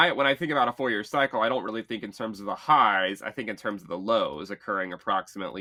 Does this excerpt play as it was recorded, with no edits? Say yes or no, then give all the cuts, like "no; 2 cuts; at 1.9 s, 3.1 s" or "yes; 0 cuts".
yes; 0 cuts